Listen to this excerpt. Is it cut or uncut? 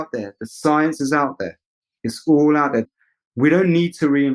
cut